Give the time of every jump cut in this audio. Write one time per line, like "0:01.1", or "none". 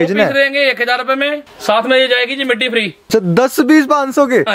0:01.5
0:03.0